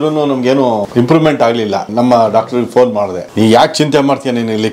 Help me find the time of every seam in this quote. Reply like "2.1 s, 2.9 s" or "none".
0.9 s, 1.9 s, 3.2 s

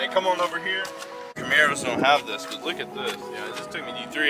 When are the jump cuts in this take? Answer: 1.4 s

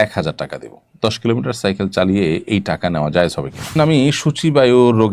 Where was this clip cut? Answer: 3.8 s

